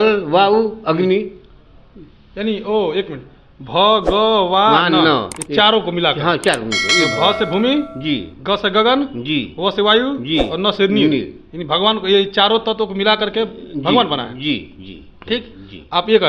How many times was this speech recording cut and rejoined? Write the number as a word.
zero